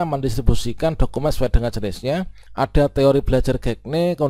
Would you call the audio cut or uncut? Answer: cut